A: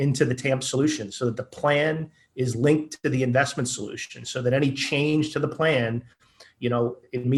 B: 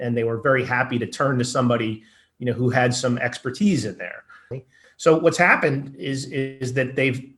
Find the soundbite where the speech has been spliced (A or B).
B